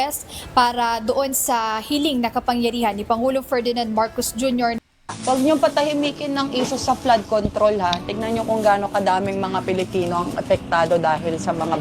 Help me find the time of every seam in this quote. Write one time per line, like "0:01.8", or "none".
0:04.8